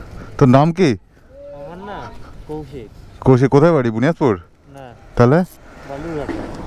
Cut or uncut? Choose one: uncut